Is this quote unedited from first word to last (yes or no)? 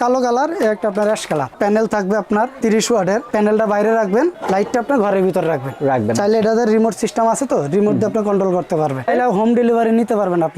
no